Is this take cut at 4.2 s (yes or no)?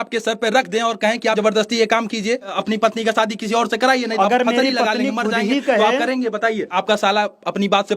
yes